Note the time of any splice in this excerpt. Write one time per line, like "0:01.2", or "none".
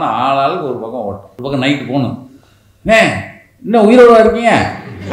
0:01.3